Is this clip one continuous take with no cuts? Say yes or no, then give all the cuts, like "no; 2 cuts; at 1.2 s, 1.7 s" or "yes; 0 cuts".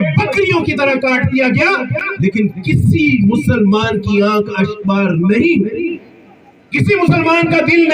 yes; 0 cuts